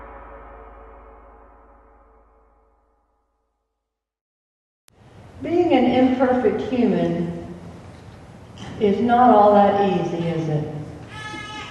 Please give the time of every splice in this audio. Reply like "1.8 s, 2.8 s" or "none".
none

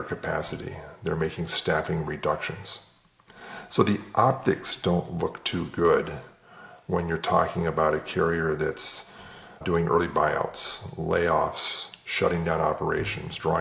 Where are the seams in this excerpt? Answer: 9.6 s

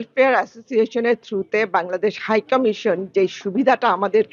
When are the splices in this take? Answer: none

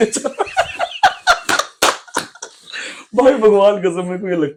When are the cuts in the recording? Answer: none

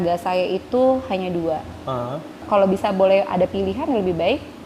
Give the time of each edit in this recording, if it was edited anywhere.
2.4 s

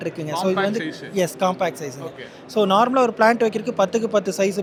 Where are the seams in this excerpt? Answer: none

